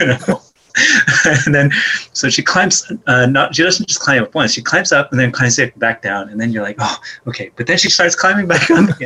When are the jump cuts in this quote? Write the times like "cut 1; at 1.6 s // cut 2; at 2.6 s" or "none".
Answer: none

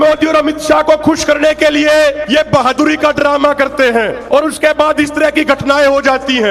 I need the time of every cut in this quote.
cut 1; at 2.2 s // cut 2; at 4.2 s

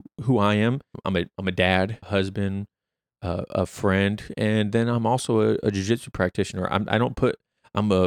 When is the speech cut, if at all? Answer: cut 1; at 0.9 s // cut 2; at 2.0 s

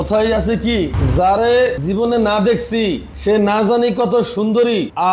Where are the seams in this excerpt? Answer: cut 1; at 1.0 s // cut 2; at 1.8 s // cut 3; at 3.1 s

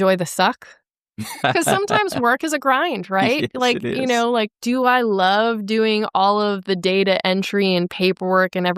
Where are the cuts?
cut 1; at 1.4 s

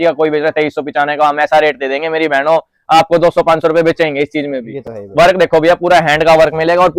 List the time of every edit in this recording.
none

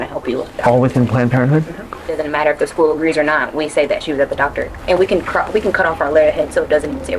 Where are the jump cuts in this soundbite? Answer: cut 1; at 2.2 s // cut 2; at 4.8 s

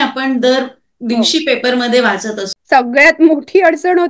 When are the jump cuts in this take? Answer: cut 1; at 2.5 s

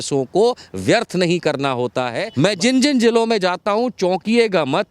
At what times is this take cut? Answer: cut 1; at 2.2 s

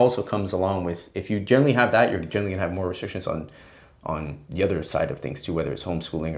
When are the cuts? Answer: none

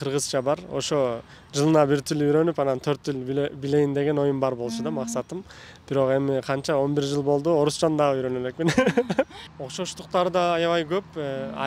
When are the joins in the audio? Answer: cut 1; at 9.4 s

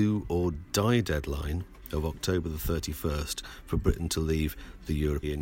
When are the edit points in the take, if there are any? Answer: none

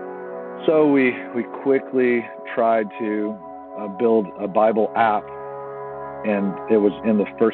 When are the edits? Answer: cut 1; at 5.8 s

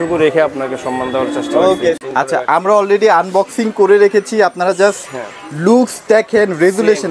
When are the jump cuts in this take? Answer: cut 1; at 2.0 s

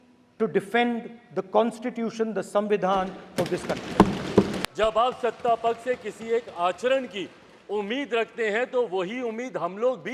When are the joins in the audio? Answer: cut 1; at 4.6 s

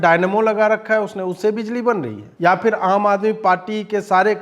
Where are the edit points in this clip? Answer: cut 1; at 2.2 s

